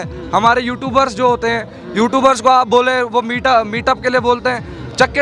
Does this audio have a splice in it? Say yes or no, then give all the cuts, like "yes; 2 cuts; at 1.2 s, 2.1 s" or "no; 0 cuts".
no; 0 cuts